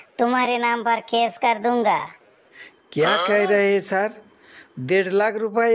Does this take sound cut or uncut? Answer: uncut